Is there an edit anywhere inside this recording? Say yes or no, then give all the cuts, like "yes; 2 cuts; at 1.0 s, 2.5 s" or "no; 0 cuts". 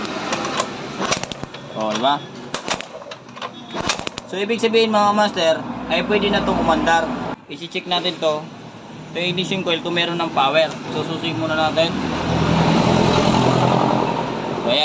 yes; 1 cut; at 7.4 s